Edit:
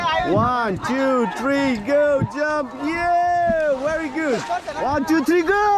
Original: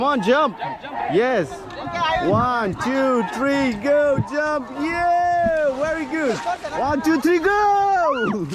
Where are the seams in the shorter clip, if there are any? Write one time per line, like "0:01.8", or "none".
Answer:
none